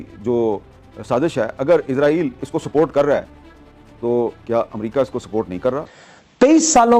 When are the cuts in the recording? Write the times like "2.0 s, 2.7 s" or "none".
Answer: none